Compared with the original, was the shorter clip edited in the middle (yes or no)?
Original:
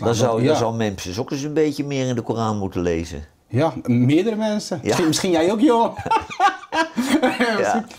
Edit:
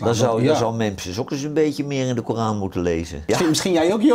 yes